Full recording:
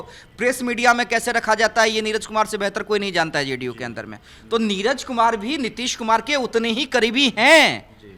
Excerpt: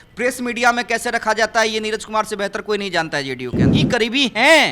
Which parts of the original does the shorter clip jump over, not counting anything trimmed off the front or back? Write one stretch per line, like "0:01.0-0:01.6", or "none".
0:04.0-0:06.8